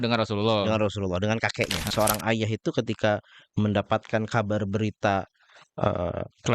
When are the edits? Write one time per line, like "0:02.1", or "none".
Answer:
0:01.9